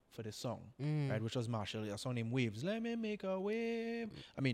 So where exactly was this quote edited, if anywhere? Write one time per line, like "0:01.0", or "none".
none